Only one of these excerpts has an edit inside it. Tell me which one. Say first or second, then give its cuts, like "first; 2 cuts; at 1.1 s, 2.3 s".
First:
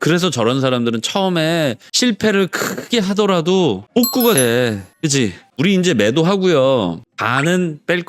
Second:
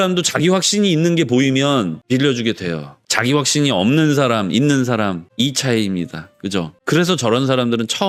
first; 1 cut; at 5.6 s